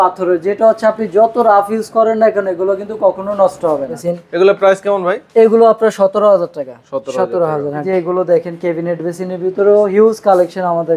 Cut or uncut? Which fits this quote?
cut